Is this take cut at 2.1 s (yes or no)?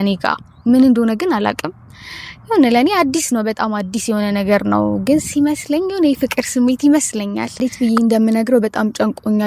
no